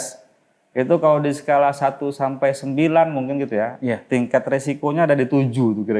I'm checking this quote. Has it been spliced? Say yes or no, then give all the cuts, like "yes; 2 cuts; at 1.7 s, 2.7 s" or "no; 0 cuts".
no; 0 cuts